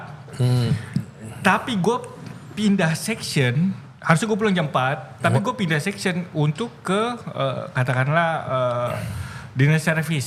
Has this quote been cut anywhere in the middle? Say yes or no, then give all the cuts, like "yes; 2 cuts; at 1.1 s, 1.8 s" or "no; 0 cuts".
no; 0 cuts